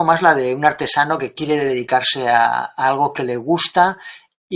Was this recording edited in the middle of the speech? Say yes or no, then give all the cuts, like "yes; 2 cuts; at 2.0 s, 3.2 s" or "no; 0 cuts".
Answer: no; 0 cuts